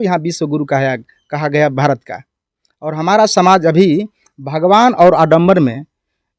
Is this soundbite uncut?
yes; 0 cuts

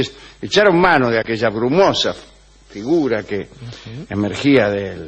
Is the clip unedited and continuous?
no; 1 cut; at 3.5 s

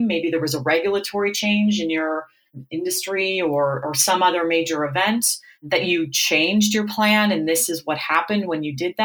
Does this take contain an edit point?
no; 0 cuts

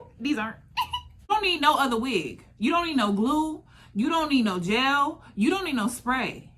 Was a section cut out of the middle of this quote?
yes; 1 cut; at 1.2 s

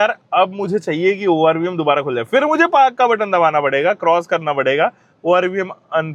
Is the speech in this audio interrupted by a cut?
no; 0 cuts

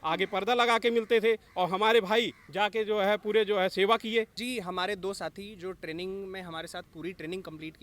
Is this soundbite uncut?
no; 1 cut; at 4.4 s

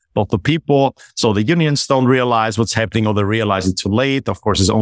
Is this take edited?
no; 0 cuts

